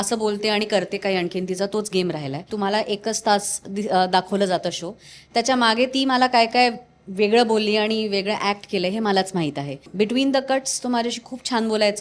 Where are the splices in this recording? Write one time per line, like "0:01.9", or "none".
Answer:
0:02.5
0:09.9